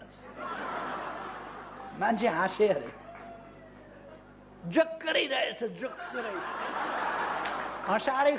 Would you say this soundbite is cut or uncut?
uncut